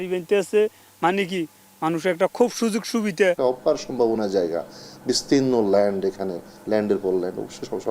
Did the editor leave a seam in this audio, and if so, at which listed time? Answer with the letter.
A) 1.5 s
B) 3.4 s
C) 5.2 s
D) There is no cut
B